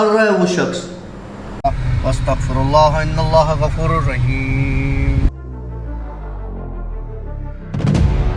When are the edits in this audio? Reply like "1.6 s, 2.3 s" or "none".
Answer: 1.5 s